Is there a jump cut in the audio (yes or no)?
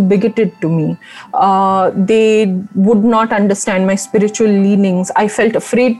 no